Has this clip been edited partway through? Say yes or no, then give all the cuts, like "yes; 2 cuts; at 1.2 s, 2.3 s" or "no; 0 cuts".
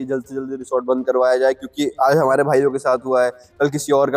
no; 0 cuts